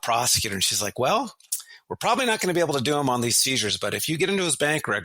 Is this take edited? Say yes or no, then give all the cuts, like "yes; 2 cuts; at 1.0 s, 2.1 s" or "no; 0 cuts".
no; 0 cuts